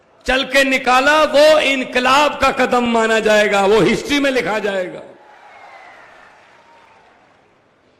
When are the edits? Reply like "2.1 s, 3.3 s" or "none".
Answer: 5.4 s